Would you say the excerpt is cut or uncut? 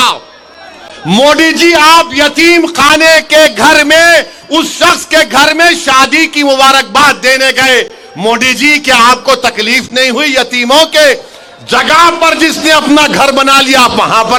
uncut